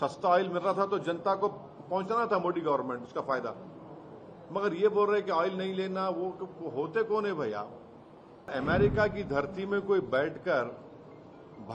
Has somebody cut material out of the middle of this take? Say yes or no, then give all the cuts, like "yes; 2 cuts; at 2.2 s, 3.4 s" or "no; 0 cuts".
yes; 1 cut; at 8.5 s